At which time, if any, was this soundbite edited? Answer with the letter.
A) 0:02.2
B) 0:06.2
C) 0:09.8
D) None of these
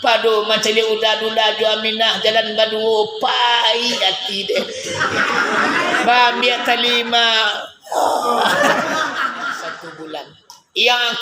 C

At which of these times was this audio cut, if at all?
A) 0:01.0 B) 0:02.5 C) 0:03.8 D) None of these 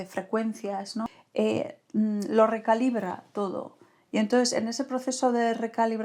A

